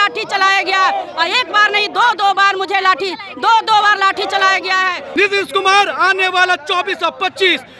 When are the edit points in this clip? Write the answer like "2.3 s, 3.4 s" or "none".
5.0 s